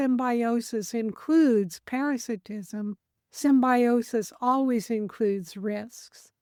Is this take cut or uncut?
uncut